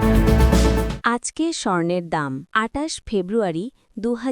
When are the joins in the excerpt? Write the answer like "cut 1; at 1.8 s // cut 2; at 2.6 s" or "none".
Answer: cut 1; at 0.9 s // cut 2; at 2.4 s